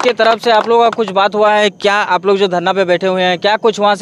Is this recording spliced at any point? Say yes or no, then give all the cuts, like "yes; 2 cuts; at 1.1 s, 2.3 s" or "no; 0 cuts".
no; 0 cuts